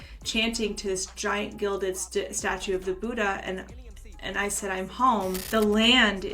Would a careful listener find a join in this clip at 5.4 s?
yes; 1 cut; at 5.4 s

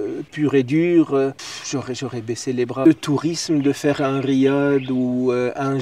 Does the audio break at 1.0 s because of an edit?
no; 1 cut; at 2.9 s

